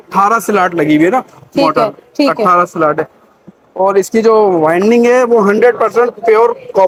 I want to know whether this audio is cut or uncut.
uncut